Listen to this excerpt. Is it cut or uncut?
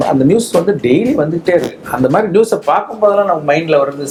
uncut